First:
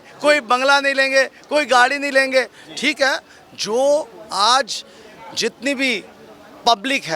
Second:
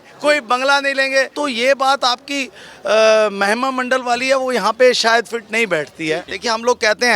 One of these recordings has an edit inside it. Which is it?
second; 2 cuts; at 1.3 s, 6.3 s

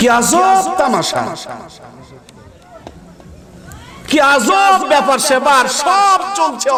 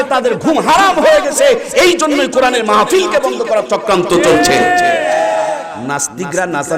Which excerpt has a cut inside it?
second; 1 cut; at 5.7 s

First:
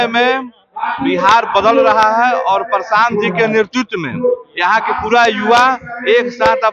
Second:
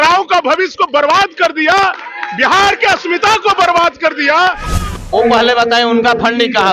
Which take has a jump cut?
second; 1 cut; at 4.9 s

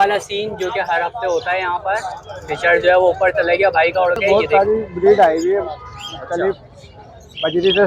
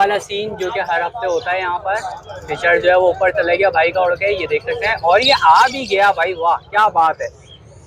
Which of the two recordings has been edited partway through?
first; 1 cut; at 4.2 s

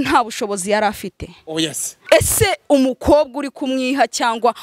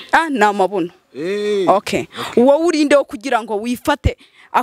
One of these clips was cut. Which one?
first; 1 cut; at 1.9 s

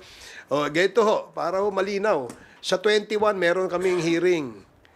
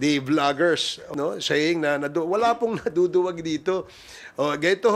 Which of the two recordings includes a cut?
second; 1 cut; at 1.1 s

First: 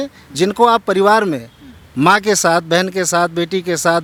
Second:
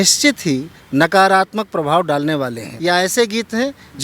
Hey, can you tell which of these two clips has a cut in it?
second; 1 cut; at 2.7 s

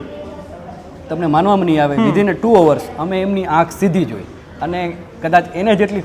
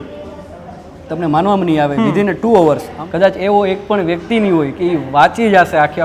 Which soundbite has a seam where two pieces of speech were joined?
second; 1 cut; at 2.9 s

